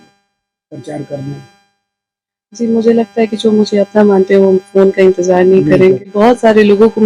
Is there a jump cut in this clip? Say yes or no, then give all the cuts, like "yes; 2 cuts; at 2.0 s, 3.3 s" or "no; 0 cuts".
yes; 1 cut; at 6.1 s